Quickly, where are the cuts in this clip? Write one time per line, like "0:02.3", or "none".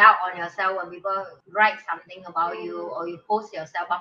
0:01.3